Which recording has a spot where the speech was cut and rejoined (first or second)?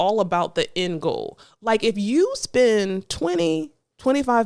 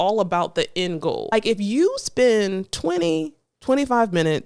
second